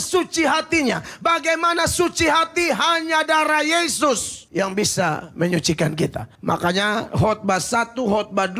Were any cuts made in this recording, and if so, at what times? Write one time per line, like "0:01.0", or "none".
none